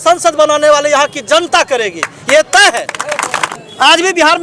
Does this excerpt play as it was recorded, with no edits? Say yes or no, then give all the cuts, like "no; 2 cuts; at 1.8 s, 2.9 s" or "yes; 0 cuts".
no; 1 cut; at 3.4 s